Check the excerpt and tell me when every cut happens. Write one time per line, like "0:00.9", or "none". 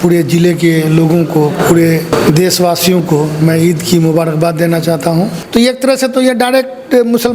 0:02.1
0:05.4